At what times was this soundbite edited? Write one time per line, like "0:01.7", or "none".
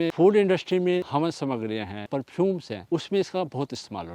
0:01.1
0:02.1
0:02.7